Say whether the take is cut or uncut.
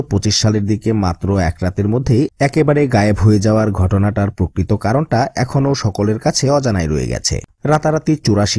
cut